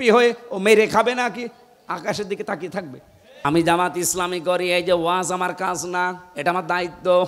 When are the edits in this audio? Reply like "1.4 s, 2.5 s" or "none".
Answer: 3.4 s